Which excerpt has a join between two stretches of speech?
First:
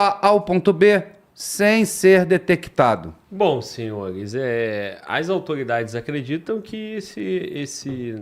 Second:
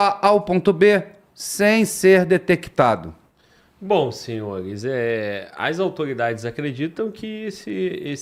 first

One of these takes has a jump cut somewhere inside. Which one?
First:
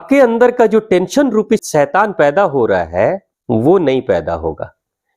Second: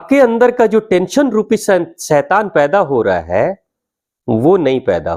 first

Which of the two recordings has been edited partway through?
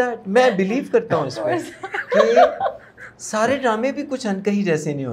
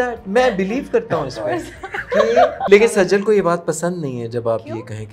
second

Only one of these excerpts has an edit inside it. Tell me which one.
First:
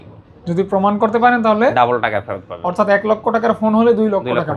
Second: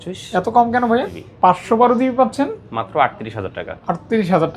second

